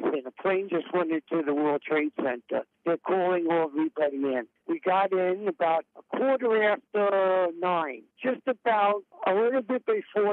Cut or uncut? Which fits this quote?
cut